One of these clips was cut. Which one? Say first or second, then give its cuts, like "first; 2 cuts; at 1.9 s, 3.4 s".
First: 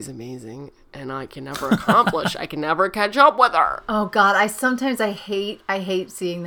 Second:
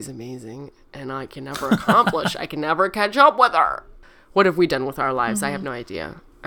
second; 1 cut; at 3.9 s